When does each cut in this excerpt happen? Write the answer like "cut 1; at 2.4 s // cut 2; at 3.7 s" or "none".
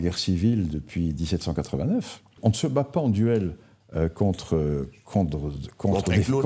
cut 1; at 2.3 s